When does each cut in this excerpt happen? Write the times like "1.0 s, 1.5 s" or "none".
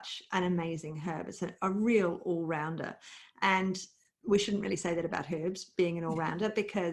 none